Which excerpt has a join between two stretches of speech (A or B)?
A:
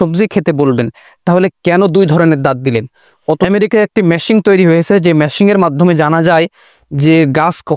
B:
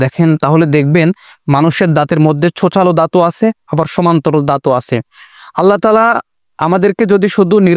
A